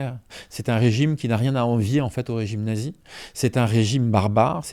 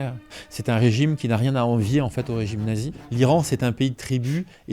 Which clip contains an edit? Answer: second; 1 cut; at 3.0 s

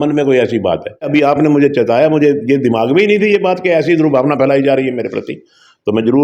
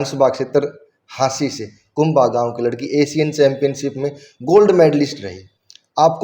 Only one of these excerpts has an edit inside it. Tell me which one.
first; 1 cut; at 1.0 s

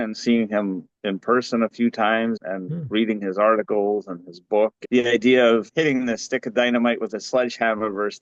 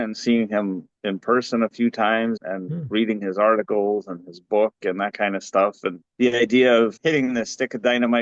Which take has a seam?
first; 1 cut; at 4.8 s

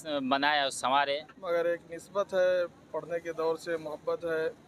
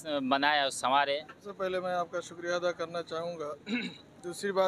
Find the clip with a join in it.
first; 1 cut; at 1.3 s

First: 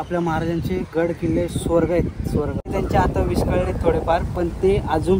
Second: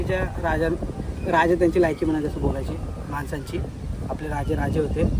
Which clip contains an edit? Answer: first; 1 cut; at 2.7 s

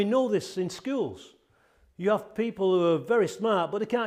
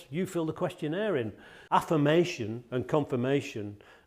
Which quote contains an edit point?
second; 1 cut; at 1.5 s

